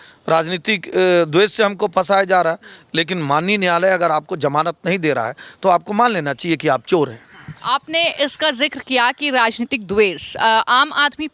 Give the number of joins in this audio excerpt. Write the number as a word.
zero